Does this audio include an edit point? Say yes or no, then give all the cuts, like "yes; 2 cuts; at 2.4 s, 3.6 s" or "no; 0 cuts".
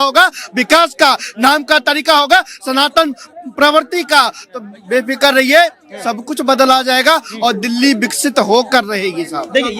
no; 0 cuts